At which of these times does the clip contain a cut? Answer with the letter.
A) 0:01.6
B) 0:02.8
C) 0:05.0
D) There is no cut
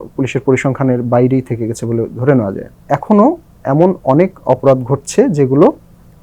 B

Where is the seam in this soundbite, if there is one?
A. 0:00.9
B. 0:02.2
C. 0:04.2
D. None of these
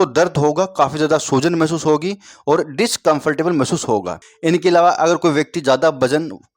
C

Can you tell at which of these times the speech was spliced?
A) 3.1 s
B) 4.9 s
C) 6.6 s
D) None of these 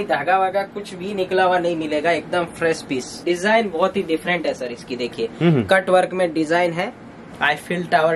A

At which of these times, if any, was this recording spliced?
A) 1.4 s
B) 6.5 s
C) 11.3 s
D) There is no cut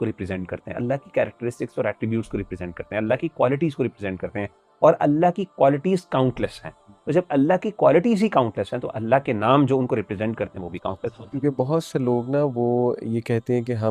C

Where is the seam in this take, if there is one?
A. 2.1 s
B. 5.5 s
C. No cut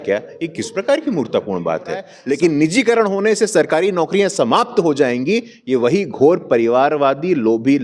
A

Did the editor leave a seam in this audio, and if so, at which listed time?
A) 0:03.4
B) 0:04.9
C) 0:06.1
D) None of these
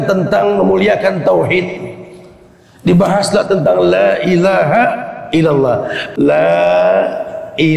C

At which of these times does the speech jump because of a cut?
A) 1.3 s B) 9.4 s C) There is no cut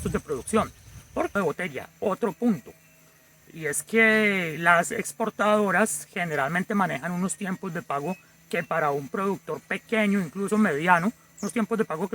A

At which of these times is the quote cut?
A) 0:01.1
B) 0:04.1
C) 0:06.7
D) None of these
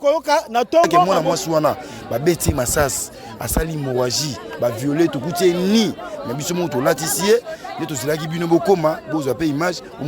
A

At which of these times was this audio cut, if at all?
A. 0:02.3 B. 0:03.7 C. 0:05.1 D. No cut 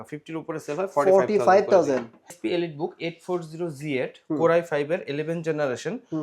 A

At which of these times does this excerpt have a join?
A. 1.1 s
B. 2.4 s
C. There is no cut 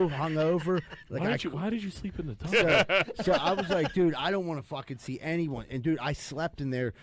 B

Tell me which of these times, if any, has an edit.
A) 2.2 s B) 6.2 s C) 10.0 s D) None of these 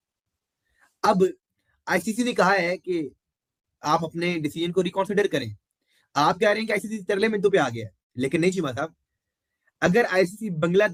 D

